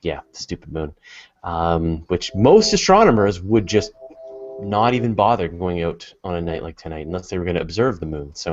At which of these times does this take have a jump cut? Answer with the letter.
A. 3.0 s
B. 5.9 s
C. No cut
B